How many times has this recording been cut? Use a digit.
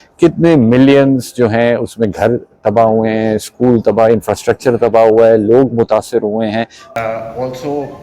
1